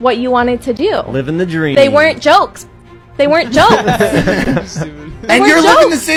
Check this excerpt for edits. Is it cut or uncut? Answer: uncut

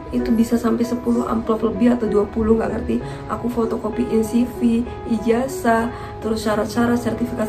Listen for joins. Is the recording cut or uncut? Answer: uncut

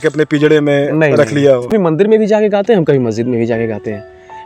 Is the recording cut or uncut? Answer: cut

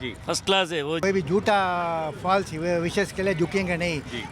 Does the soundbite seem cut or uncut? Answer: cut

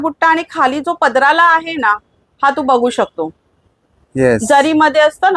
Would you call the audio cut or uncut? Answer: uncut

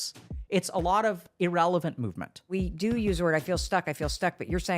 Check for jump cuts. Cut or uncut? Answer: cut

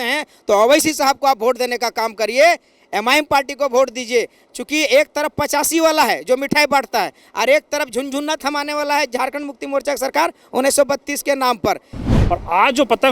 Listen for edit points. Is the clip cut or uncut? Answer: cut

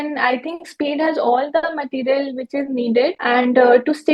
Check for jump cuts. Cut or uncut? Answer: cut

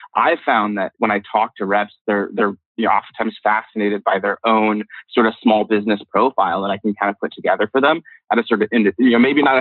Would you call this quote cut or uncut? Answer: cut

